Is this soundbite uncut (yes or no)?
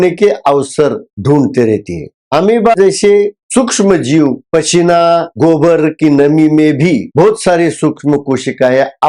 yes